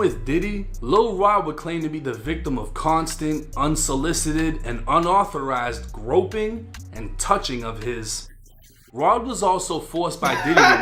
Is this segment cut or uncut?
uncut